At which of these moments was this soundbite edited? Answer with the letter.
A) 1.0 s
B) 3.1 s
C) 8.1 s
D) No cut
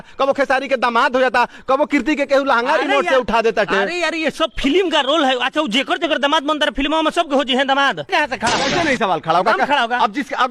C